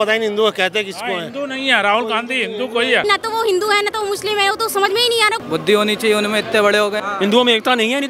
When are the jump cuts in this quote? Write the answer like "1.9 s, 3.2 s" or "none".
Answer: 3.0 s, 5.4 s, 7.0 s